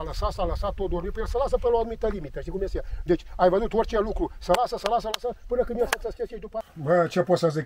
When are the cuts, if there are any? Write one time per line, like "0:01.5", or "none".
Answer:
0:06.5